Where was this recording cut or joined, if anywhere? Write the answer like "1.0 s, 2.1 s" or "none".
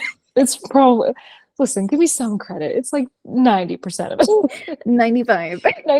4.6 s